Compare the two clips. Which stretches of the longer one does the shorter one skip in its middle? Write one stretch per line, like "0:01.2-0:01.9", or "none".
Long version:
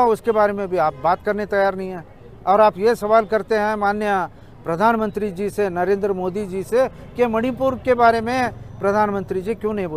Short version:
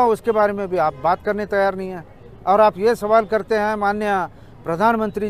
none